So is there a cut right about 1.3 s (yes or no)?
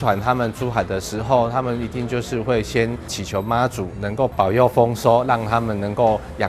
no